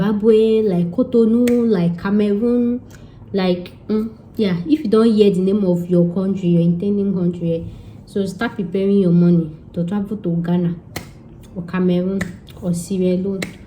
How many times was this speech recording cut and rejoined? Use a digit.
0